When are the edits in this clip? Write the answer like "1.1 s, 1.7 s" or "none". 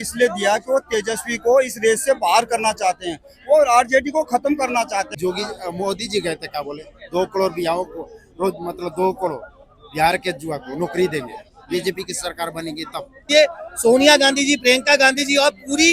5.1 s, 13.3 s